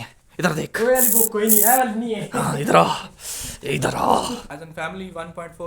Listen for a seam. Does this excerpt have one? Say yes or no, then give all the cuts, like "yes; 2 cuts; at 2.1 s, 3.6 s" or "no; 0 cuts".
yes; 1 cut; at 4.6 s